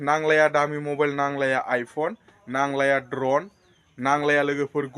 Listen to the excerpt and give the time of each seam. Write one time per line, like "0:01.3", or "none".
none